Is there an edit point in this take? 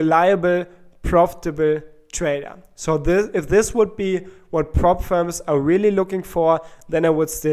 no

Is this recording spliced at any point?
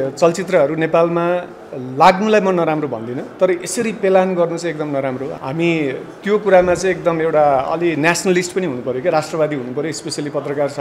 yes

